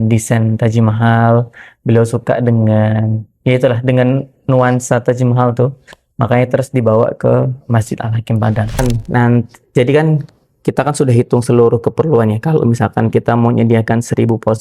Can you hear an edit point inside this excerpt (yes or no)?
yes